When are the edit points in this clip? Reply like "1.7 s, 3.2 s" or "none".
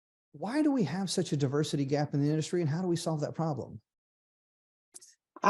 none